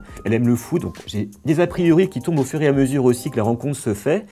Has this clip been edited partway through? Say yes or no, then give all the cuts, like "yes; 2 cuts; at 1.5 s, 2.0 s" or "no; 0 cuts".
no; 0 cuts